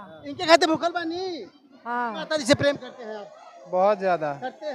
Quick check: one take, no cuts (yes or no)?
no